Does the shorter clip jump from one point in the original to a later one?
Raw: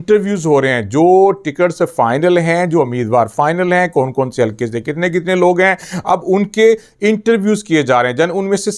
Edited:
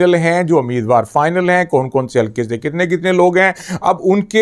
no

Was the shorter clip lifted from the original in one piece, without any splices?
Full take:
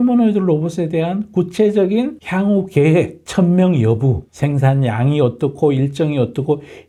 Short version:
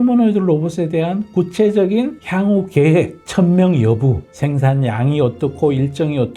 yes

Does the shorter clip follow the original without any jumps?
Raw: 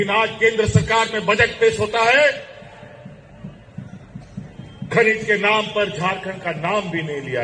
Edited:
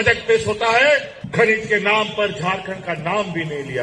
no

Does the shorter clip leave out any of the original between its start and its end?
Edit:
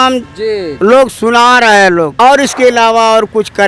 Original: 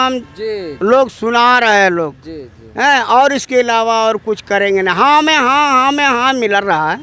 yes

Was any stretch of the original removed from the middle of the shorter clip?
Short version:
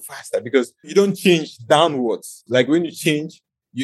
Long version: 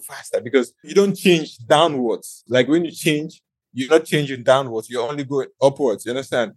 no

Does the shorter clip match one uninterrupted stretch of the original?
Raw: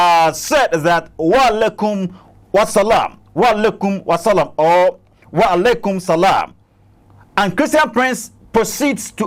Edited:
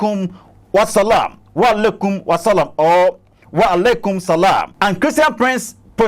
no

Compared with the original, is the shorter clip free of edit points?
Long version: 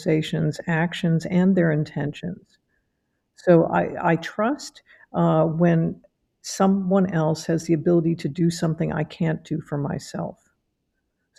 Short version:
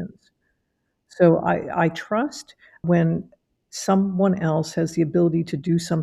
no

